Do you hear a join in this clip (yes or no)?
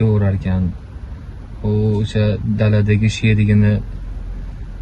no